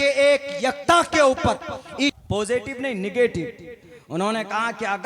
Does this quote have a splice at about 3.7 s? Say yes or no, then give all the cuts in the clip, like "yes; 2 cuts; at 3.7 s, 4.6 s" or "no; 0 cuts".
no; 1 cut; at 2.2 s